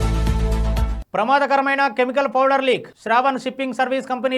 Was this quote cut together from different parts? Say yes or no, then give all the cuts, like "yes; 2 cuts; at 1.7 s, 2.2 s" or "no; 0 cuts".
yes; 1 cut; at 1.0 s